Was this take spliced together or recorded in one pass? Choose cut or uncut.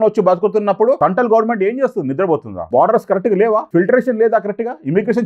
cut